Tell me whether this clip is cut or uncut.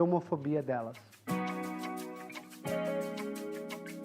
cut